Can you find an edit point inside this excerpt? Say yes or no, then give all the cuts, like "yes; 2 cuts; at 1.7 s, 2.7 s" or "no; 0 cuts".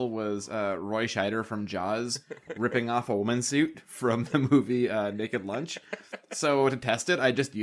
no; 0 cuts